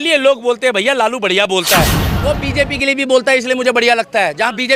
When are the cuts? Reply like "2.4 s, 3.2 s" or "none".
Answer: 2.0 s